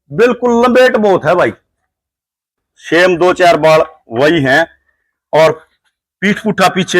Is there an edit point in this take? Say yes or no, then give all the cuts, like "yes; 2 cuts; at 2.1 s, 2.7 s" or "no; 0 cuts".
yes; 1 cut; at 2.6 s